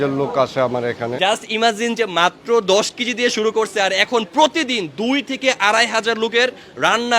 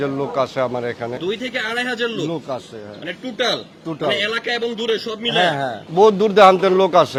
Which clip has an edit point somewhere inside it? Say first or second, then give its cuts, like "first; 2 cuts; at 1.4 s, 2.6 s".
first; 1 cut; at 1.1 s